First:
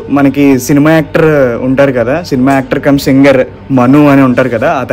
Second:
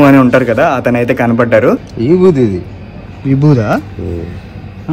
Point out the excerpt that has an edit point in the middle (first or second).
second